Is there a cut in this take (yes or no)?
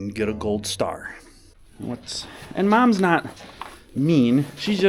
yes